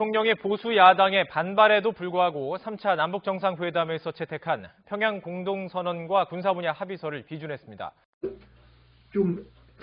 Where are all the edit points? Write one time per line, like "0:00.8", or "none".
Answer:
0:08.2

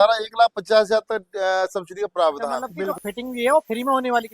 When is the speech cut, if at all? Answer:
0:02.9

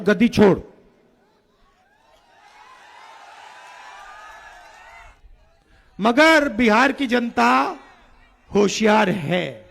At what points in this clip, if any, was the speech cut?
0:05.2

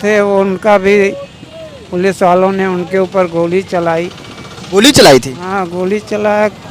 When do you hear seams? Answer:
none

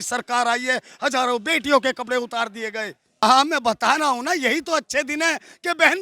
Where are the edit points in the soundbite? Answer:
0:03.1

